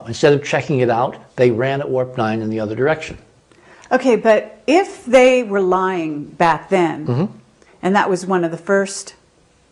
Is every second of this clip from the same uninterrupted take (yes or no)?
yes